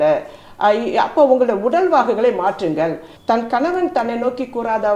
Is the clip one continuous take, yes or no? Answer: no